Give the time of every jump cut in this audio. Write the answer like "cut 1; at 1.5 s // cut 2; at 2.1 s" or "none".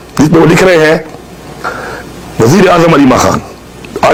none

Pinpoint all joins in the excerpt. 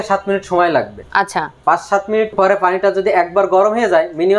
none

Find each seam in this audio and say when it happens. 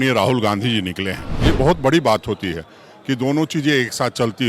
cut 1; at 1.3 s

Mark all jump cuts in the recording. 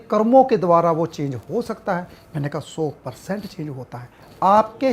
none

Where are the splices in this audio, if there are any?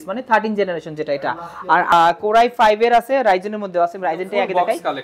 cut 1; at 1.9 s

